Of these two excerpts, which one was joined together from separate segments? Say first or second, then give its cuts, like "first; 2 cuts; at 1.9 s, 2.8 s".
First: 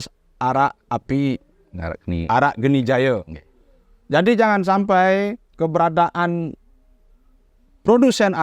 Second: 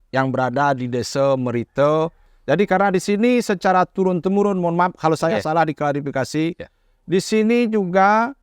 second; 1 cut; at 2.3 s